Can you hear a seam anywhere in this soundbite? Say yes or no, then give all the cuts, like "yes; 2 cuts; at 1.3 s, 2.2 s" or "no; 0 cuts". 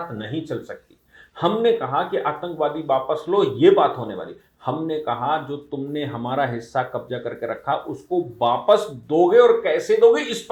no; 0 cuts